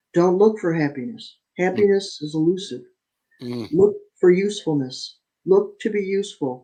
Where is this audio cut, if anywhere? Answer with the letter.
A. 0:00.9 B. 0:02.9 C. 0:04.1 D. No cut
D